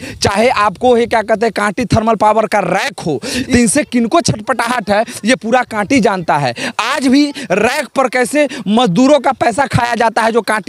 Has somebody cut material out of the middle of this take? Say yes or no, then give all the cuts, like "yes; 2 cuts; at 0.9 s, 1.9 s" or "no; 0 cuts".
yes; 1 cut; at 3.4 s